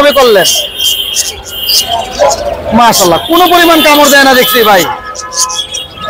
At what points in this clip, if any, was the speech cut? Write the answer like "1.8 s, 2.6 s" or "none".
none